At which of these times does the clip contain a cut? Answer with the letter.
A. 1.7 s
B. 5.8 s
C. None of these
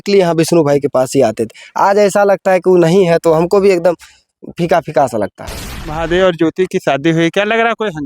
B